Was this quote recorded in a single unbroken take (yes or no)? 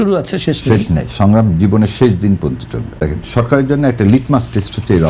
no